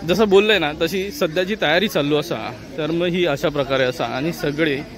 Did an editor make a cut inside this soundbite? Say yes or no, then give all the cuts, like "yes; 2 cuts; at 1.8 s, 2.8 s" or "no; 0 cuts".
no; 0 cuts